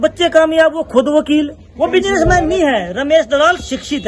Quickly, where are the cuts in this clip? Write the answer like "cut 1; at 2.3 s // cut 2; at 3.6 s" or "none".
cut 1; at 1.6 s